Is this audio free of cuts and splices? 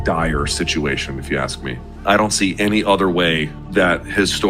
no; 1 cut; at 1.9 s

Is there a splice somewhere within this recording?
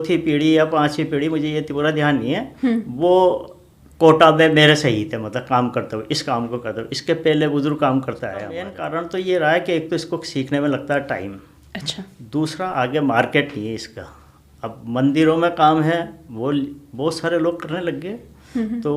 yes; 1 cut; at 8.7 s

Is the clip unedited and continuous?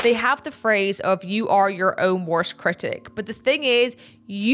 yes; 0 cuts

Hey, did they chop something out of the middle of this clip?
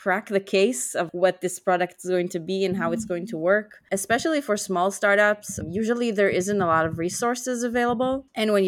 yes; 2 cuts; at 3.8 s, 5.5 s

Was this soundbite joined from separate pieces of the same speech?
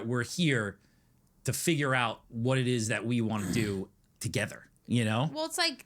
yes; 1 cut; at 4.2 s

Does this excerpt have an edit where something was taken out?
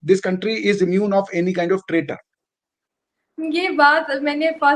no; 0 cuts

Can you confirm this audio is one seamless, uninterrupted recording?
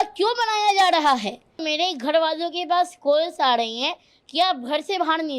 no; 1 cut; at 1.6 s

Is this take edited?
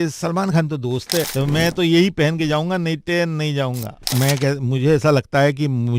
yes; 2 cuts; at 1.3 s, 4.1 s

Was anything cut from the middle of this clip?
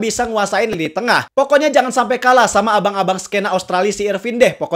no; 0 cuts

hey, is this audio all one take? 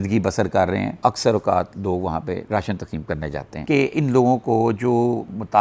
no; 2 cuts; at 1.0 s, 3.6 s

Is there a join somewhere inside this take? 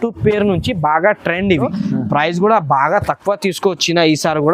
yes; 1 cut; at 1.7 s

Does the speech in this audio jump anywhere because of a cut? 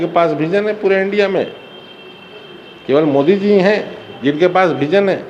no; 0 cuts

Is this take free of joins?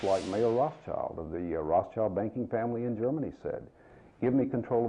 yes; 0 cuts

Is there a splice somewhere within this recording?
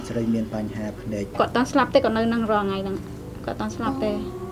yes; 1 cut; at 1.2 s

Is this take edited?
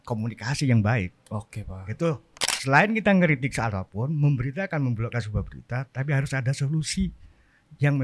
yes; 1 cut; at 2.4 s

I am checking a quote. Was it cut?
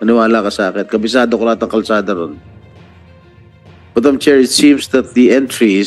yes; 2 cuts; at 2.4 s, 3.9 s

